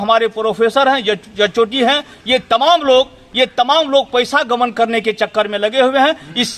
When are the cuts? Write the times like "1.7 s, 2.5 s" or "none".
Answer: none